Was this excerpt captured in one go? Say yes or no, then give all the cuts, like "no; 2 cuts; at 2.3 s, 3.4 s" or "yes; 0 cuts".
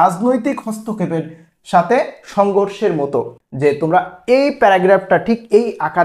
no; 1 cut; at 3.4 s